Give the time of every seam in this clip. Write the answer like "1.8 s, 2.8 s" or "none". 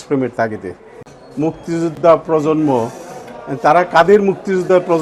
1.0 s